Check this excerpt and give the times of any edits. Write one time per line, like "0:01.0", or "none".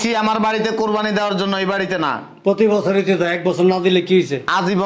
none